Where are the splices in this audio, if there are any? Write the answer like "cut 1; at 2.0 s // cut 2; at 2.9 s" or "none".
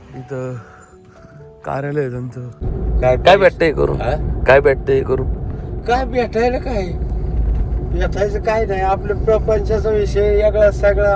cut 1; at 2.6 s